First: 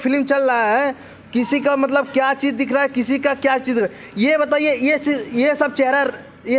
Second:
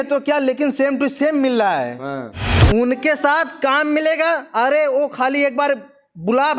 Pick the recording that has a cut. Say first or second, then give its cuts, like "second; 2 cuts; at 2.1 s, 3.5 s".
second; 1 cut; at 2.3 s